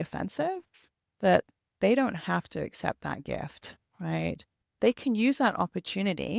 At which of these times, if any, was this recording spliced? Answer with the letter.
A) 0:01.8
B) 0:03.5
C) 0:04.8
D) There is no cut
C